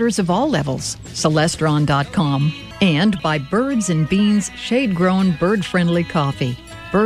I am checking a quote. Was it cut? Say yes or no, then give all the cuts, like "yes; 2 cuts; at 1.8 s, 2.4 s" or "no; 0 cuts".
yes; 1 cut; at 2.6 s